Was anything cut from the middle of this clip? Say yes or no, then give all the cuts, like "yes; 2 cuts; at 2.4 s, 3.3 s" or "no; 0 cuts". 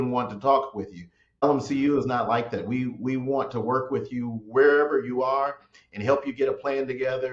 yes; 1 cut; at 1.4 s